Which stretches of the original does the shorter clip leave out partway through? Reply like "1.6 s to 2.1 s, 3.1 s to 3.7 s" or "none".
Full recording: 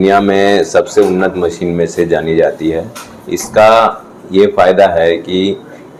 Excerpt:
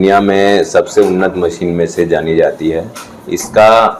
none